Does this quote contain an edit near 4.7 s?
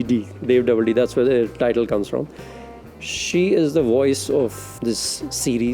yes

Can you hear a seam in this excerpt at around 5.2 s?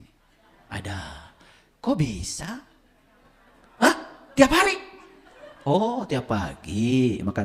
no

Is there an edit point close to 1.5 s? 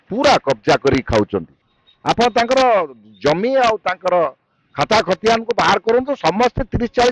yes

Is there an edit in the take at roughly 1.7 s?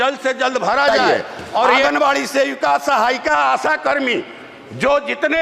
yes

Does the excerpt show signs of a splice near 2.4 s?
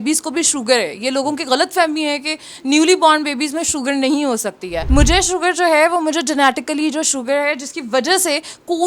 no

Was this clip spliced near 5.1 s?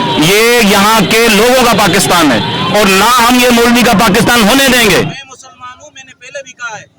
yes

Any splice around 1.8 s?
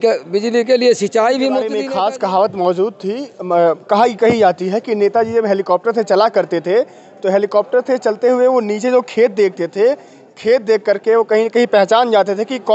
yes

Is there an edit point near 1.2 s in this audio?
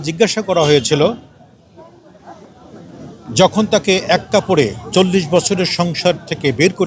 no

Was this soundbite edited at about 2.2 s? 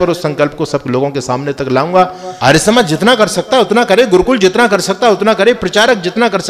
yes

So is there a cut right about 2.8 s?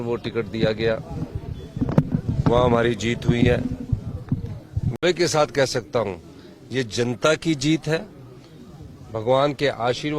no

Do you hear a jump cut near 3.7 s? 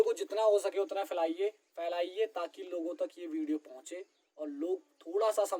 no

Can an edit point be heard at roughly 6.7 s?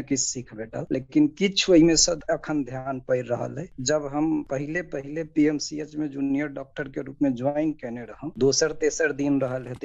no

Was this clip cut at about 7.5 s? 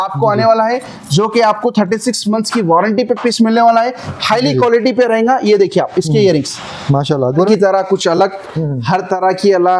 yes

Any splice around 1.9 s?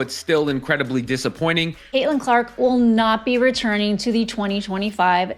yes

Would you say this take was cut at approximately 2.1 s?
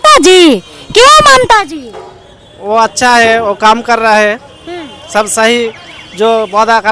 no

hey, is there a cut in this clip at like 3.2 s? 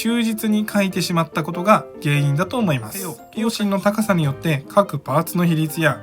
yes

